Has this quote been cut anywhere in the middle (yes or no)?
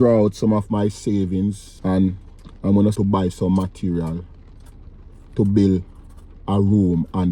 yes